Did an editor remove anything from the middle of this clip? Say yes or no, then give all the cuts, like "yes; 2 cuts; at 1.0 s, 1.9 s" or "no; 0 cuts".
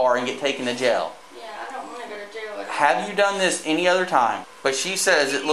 yes; 1 cut; at 4.5 s